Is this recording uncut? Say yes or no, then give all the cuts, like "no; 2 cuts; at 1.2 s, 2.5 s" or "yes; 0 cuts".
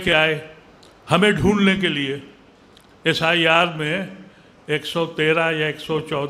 yes; 0 cuts